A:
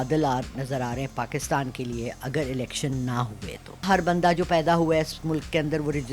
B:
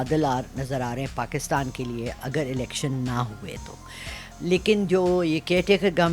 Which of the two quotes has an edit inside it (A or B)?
A